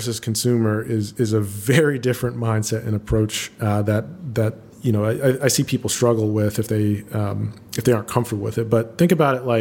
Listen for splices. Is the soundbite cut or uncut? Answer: uncut